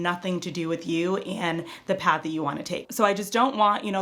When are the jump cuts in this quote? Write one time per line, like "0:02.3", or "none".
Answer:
0:02.8